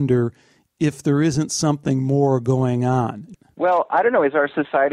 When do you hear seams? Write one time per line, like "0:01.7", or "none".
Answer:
0:03.3